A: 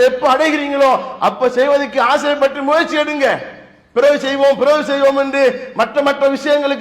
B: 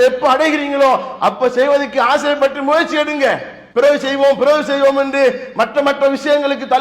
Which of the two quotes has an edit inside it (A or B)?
B